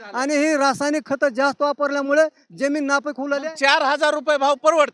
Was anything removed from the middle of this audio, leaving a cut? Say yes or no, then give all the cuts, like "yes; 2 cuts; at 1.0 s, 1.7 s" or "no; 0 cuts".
no; 0 cuts